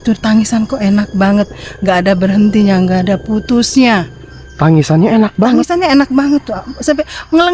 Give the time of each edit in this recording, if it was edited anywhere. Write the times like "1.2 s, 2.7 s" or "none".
none

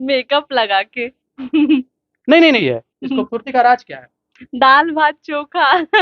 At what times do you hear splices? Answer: 2.6 s

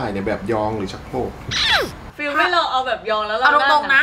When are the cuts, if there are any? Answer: 2.0 s

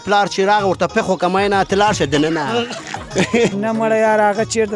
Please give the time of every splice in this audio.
3.5 s

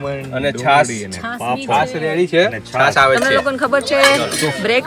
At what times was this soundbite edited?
3.2 s

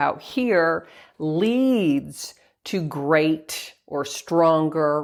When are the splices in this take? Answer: none

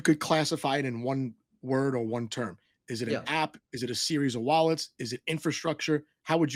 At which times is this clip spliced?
none

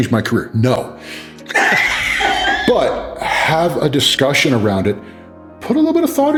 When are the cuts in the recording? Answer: none

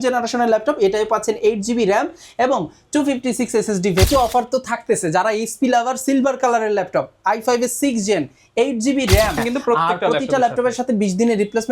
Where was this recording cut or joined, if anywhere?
4.0 s, 9.4 s

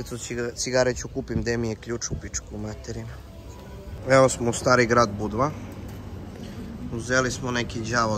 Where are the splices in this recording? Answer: none

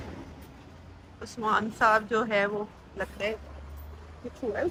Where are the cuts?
none

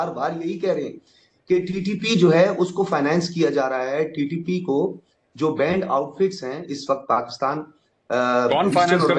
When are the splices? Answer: none

